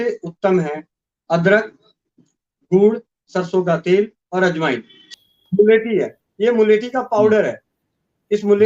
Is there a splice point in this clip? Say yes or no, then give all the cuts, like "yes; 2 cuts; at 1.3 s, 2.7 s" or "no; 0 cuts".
yes; 1 cut; at 5.0 s